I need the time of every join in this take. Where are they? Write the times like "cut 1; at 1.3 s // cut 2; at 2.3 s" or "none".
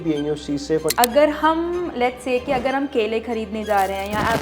cut 1; at 0.9 s